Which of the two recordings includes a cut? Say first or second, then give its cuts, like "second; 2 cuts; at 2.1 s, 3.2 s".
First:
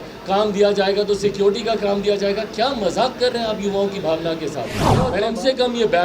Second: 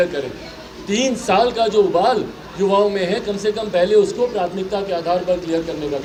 first; 1 cut; at 5.0 s